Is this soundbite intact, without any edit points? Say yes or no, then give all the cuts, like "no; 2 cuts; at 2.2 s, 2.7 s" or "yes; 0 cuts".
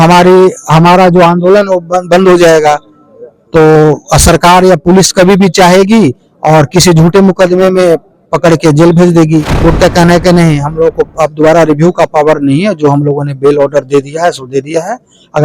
no; 1 cut; at 9.5 s